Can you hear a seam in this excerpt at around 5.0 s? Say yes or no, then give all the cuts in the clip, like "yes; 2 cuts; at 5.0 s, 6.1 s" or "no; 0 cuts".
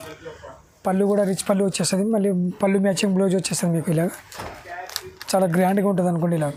no; 0 cuts